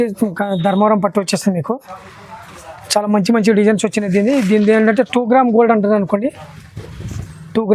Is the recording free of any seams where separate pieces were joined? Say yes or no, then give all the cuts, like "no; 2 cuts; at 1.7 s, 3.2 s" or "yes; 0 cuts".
yes; 0 cuts